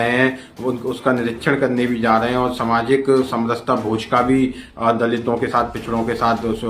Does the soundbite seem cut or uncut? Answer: uncut